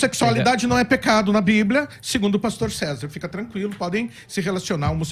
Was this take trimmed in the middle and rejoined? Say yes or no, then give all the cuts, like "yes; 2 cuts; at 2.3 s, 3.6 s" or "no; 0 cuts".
no; 0 cuts